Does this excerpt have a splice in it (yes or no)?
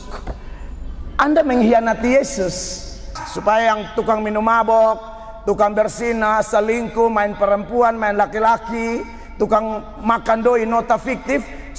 yes